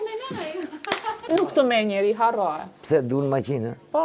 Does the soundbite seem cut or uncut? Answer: cut